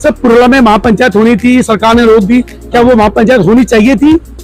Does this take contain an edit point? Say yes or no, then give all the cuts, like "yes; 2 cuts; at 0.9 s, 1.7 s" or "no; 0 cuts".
no; 0 cuts